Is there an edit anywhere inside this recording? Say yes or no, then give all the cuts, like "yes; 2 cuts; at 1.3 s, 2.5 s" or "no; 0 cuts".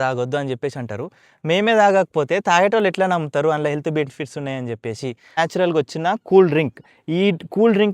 yes; 1 cut; at 5.4 s